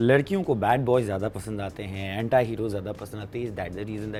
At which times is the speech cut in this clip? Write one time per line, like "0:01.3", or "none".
none